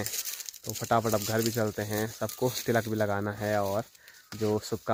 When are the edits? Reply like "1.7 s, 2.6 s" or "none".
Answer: none